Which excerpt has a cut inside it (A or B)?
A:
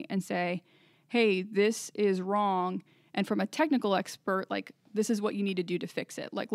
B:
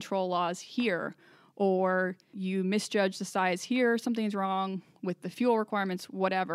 B